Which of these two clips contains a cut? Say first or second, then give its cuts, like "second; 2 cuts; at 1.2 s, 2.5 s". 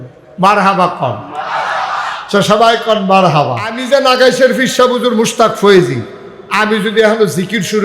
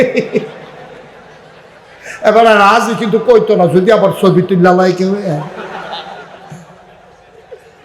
first; 1 cut; at 3.7 s